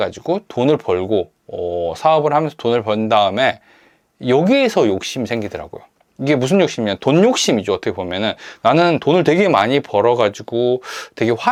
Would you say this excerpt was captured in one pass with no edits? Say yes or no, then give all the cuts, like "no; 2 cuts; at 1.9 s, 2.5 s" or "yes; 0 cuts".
yes; 0 cuts